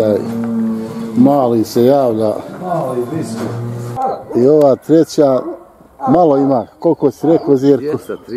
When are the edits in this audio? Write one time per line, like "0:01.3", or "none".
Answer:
0:03.9